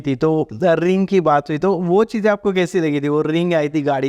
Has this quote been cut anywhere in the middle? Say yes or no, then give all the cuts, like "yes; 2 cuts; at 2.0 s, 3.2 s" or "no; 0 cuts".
no; 0 cuts